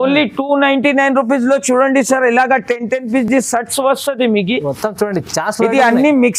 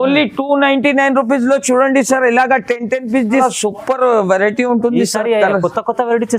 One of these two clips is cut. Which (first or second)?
second